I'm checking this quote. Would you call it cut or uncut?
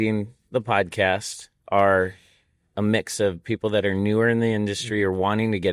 uncut